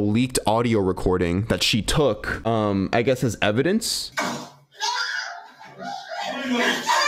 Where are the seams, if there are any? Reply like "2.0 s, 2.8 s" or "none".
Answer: none

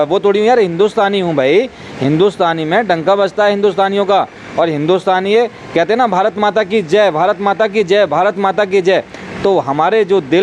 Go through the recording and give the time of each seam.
none

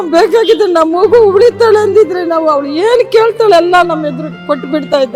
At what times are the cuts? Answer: none

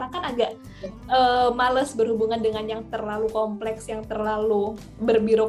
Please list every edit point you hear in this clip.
none

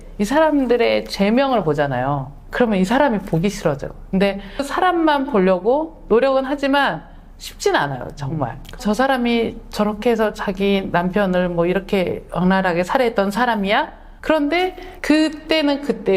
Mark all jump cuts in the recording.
4.3 s

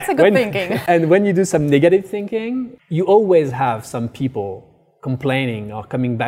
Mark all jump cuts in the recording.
0.8 s, 2.7 s

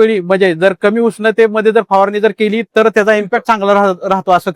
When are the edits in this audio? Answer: 3.3 s

